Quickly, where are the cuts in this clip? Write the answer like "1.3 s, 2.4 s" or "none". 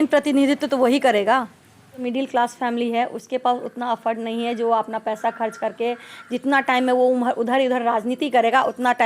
2.0 s